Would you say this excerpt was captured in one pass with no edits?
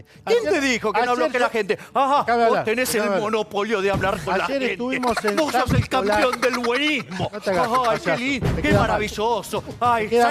yes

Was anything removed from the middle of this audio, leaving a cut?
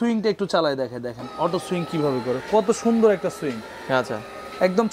no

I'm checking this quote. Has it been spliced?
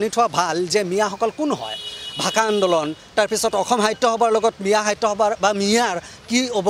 no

